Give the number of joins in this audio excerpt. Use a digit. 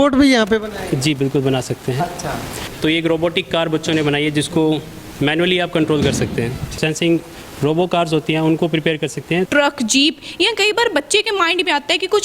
3